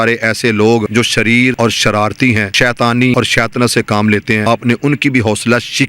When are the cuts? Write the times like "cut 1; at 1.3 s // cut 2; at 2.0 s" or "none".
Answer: cut 1; at 1.2 s // cut 2; at 2.5 s // cut 3; at 3.1 s // cut 4; at 4.4 s